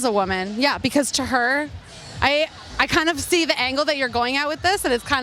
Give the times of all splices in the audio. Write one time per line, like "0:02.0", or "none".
none

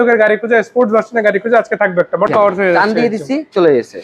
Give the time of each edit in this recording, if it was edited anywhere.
0:02.3

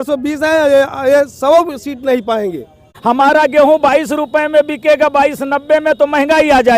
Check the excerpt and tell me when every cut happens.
0:02.9

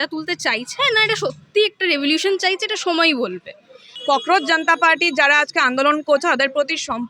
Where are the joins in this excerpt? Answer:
0:03.9

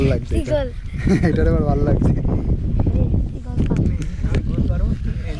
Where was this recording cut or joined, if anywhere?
none

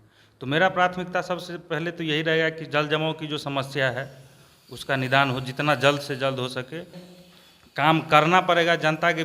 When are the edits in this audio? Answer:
0:07.0

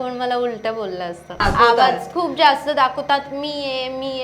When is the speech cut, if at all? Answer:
0:01.4

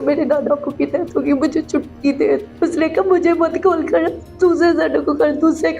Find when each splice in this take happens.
0:02.5

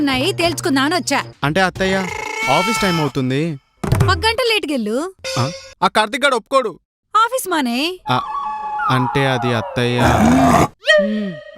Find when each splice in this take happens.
0:01.3

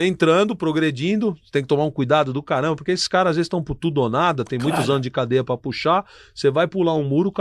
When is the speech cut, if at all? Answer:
none

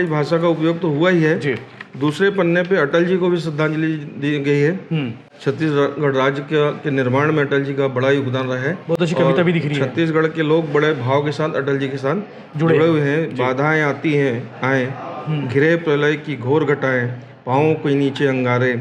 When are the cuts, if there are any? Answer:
none

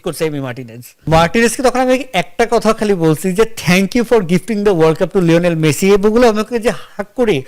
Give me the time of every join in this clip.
0:01.0

